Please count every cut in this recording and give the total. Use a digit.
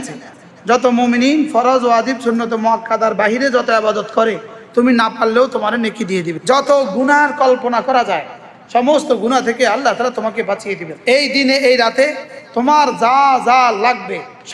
2